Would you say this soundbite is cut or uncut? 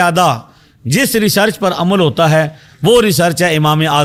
uncut